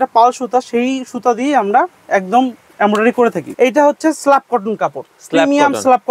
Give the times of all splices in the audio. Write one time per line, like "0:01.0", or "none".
0:03.4

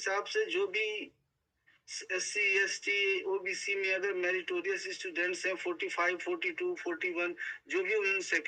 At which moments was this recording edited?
none

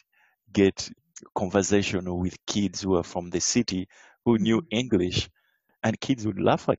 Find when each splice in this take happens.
0:05.6

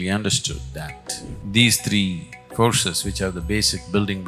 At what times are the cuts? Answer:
0:01.4

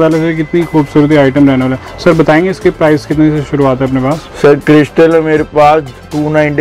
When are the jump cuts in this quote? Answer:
none

